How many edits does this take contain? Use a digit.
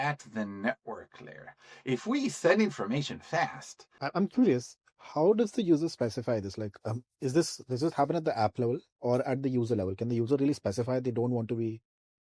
1